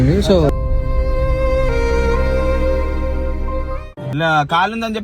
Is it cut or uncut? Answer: cut